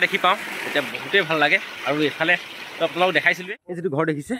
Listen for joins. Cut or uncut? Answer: cut